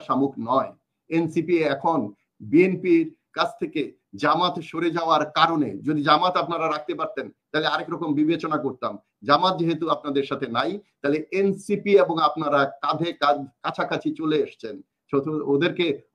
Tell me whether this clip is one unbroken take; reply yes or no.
yes